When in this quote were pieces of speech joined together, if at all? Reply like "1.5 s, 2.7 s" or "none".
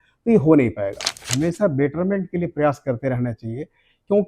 1.3 s

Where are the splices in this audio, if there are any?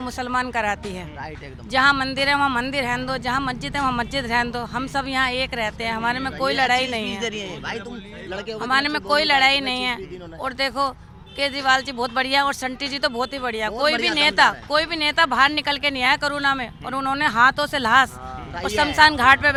none

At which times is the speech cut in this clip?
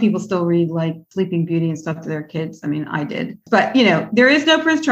1.0 s

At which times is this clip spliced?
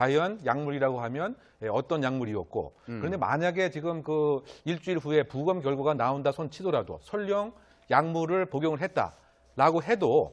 none

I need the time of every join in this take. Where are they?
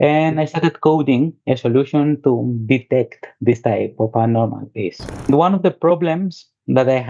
5.3 s

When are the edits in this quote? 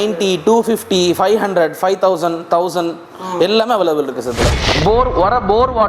4.5 s

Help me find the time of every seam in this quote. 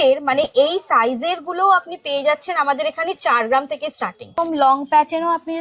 4.3 s

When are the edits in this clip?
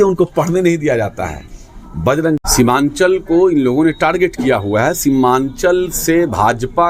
2.4 s

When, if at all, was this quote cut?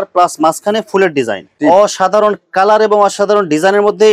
1.4 s

